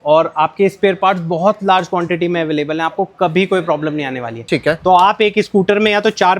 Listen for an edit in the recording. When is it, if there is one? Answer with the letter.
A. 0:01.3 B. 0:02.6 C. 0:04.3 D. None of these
C